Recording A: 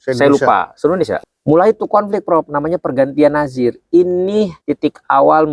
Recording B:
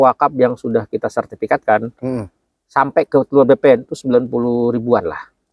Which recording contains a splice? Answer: A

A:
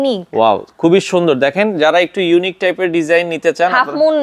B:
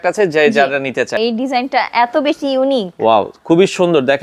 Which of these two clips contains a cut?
B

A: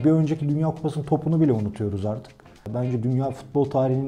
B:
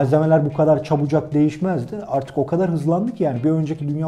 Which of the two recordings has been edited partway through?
A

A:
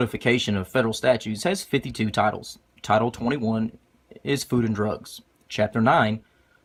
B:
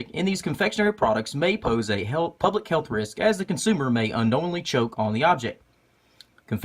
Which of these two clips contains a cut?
B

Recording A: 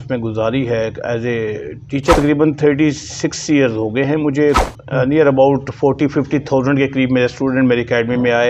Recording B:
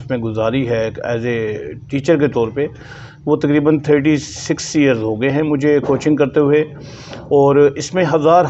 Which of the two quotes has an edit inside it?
A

